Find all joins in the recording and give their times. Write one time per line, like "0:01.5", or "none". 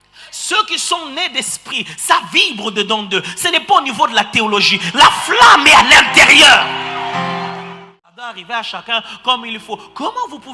0:07.6